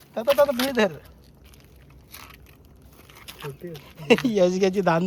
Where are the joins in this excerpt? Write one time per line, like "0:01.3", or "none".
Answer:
none